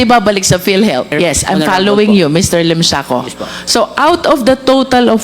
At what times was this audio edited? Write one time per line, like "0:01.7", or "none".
0:01.1